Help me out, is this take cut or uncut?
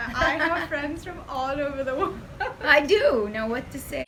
uncut